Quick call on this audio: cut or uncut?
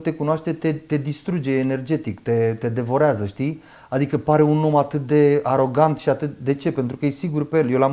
uncut